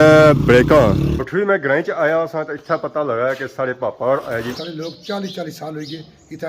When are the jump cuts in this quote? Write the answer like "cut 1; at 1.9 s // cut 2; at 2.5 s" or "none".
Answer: cut 1; at 1.0 s // cut 2; at 4.5 s

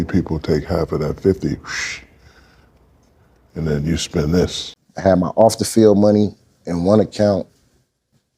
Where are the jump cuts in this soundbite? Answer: cut 1; at 4.7 s

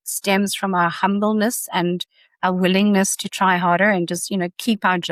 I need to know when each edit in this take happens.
none

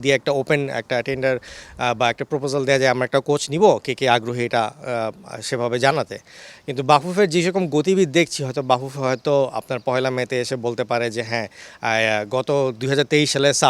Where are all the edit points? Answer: none

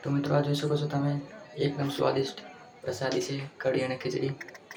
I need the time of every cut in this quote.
none

